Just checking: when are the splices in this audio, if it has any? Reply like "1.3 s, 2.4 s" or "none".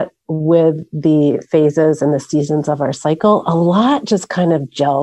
none